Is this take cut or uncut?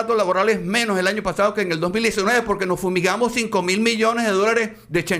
uncut